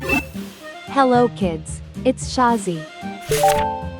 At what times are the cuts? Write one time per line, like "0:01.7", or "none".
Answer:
0:01.0